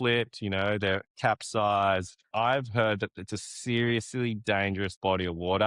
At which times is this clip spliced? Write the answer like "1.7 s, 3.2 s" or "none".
2.3 s